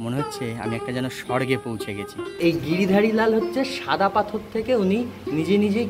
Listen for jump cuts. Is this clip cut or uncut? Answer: cut